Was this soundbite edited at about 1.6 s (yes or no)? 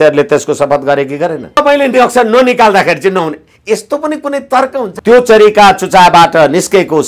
yes